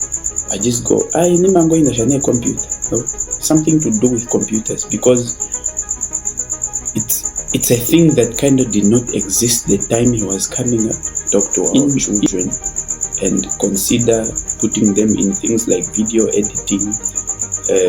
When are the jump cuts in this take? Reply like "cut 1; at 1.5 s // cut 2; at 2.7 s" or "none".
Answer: cut 1; at 12.3 s